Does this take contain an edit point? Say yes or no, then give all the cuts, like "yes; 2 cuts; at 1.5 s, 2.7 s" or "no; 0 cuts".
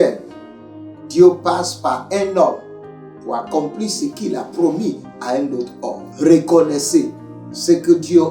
yes; 1 cut; at 6.0 s